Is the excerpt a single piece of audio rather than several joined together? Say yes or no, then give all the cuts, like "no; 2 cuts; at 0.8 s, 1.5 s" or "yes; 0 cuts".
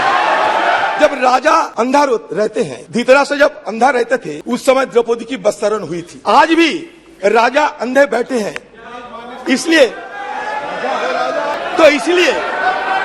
no; 6 cuts; at 0.9 s, 1.7 s, 2.8 s, 4.3 s, 6.1 s, 11.6 s